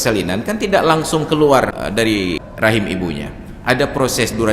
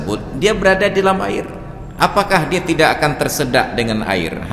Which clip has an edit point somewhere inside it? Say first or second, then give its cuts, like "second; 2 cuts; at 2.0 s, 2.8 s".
first; 1 cut; at 2.1 s